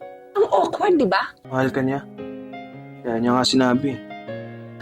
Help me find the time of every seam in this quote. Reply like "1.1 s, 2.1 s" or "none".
1.4 s